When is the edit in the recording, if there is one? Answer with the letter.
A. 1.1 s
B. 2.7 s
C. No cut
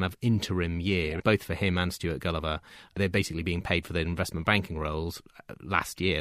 C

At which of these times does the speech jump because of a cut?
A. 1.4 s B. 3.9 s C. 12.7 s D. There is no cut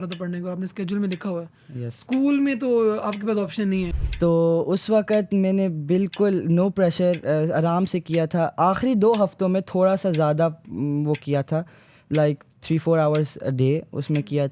B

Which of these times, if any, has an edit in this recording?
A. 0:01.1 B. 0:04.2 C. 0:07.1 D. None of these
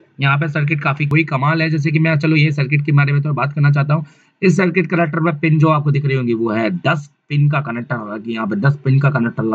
A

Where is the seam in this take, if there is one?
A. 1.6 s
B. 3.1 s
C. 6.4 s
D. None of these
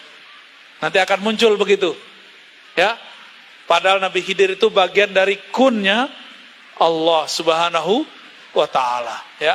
D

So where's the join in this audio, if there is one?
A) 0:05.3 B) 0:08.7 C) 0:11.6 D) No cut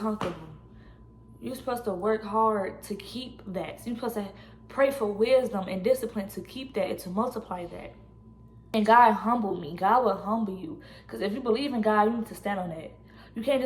B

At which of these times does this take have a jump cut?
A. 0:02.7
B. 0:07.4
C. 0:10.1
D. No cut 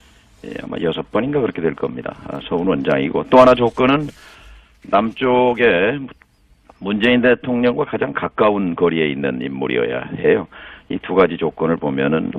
C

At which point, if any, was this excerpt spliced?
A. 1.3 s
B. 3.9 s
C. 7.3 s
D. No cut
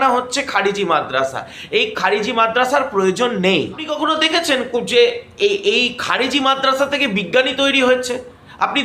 B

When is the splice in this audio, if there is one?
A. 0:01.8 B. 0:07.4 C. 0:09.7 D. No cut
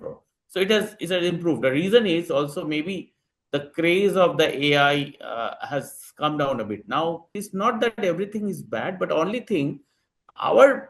B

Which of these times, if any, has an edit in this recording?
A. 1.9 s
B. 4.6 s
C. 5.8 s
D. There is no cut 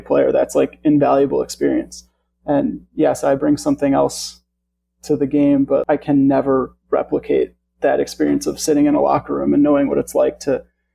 C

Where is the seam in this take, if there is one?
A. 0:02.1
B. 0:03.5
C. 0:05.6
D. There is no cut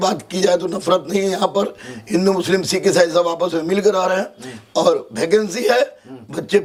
D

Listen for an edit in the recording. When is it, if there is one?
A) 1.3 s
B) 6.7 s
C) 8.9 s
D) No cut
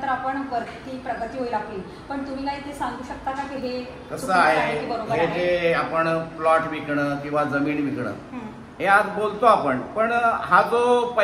D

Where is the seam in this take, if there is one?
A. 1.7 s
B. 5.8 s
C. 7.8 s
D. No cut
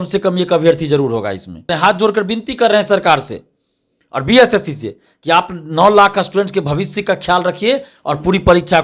A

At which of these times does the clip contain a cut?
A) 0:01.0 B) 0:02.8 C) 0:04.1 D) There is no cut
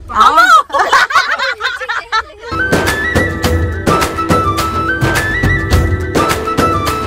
D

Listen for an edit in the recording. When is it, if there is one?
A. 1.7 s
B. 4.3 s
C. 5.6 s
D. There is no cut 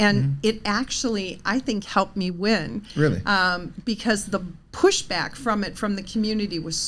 D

